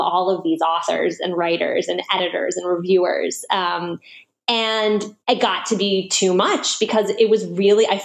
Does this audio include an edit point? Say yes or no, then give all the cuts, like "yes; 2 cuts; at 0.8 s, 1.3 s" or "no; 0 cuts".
yes; 1 cut; at 5.1 s